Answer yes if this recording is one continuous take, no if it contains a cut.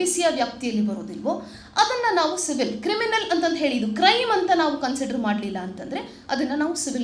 yes